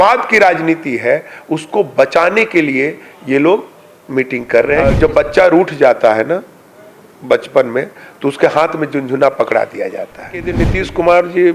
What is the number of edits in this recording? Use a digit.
2